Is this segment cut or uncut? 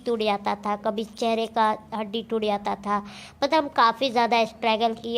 uncut